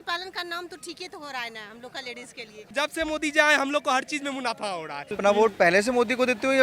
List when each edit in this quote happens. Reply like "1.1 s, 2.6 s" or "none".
2.7 s, 5.2 s